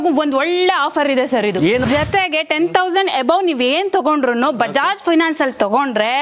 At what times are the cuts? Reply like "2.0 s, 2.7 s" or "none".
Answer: 1.8 s